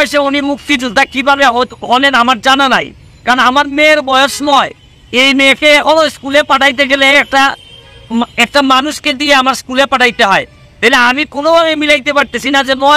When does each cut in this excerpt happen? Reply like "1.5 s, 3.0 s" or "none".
none